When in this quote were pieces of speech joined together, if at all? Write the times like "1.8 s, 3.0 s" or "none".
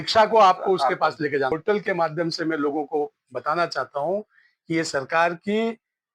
1.5 s